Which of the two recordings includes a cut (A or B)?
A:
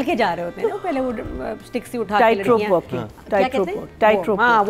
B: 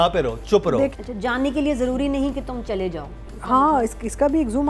B